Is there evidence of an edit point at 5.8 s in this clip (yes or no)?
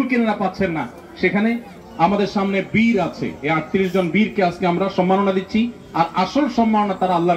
no